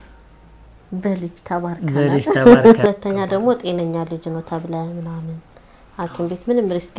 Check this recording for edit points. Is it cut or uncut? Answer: cut